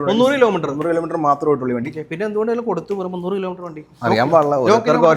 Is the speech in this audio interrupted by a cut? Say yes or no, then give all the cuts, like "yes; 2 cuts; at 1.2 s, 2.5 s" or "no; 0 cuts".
no; 0 cuts